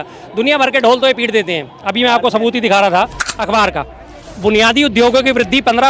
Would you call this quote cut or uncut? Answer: cut